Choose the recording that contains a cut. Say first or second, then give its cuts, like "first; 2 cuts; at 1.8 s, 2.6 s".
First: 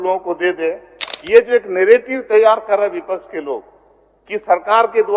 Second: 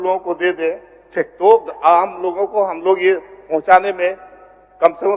first; 1 cut; at 1.0 s